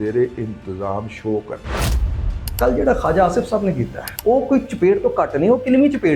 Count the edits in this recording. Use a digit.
2